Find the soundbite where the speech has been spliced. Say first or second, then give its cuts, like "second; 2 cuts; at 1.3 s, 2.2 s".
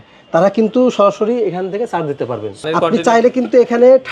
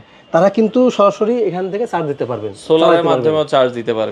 first; 1 cut; at 2.6 s